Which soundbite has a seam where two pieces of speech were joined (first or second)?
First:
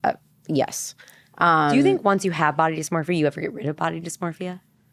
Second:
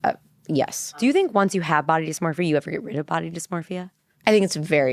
second